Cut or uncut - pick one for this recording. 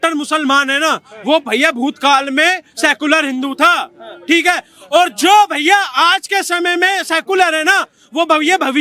uncut